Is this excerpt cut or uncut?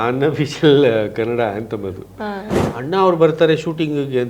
cut